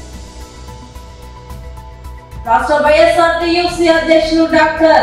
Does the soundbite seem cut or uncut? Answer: cut